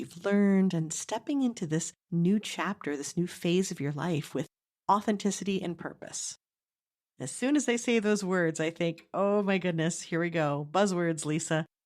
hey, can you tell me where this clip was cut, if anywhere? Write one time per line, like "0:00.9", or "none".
0:02.0